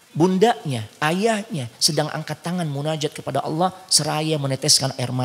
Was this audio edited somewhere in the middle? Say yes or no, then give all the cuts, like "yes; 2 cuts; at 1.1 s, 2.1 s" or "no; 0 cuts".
no; 0 cuts